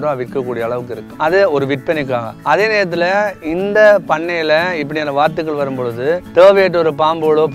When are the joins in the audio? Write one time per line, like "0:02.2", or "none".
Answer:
0:01.0
0:02.3
0:06.2